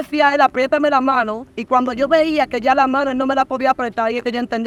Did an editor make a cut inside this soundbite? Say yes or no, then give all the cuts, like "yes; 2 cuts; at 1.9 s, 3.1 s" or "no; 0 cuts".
no; 0 cuts